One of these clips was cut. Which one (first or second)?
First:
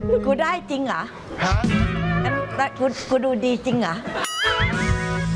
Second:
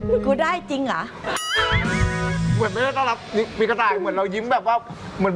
second